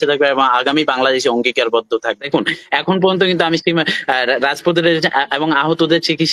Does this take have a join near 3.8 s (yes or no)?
no